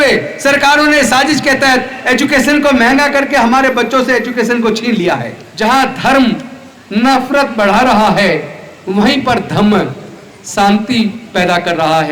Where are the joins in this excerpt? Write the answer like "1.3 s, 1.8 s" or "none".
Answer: 5.4 s

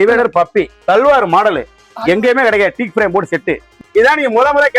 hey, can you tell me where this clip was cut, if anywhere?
3.8 s

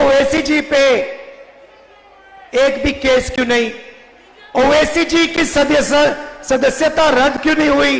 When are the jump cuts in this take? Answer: none

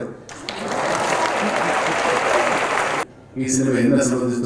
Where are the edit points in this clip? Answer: 3.0 s

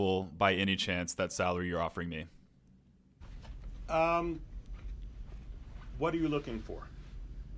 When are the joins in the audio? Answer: none

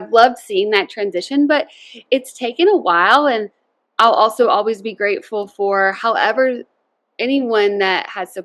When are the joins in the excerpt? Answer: none

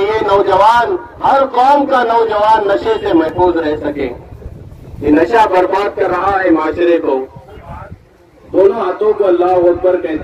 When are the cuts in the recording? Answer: 7.6 s

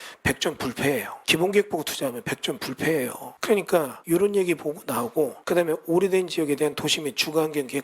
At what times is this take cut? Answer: 1.2 s, 3.3 s, 4.0 s, 5.4 s

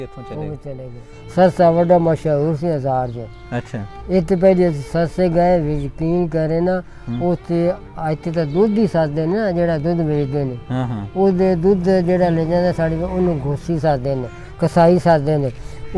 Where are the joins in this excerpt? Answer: 1.1 s

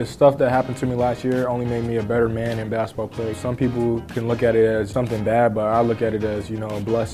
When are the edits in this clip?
3.4 s, 4.9 s

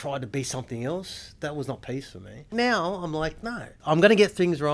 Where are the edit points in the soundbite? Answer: 2.5 s, 3.7 s

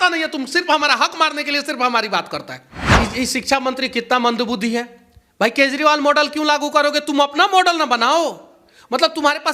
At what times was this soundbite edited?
2.8 s

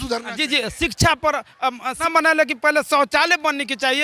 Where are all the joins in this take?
2.0 s

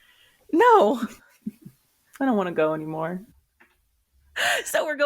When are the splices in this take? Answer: 3.3 s

